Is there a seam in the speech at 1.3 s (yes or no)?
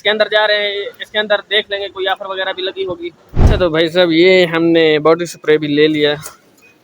no